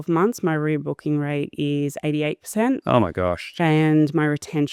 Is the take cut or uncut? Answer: uncut